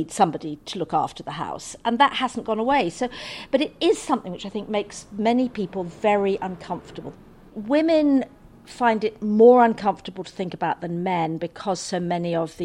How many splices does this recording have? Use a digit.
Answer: 1